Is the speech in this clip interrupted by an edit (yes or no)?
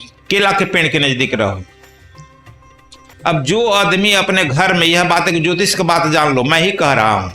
yes